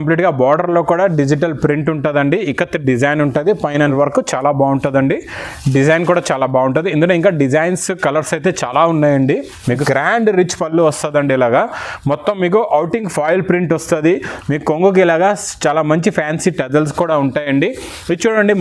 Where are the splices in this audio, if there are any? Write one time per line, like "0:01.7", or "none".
0:03.9
0:09.7